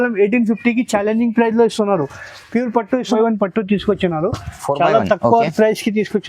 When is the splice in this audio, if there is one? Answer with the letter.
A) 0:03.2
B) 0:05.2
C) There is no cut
A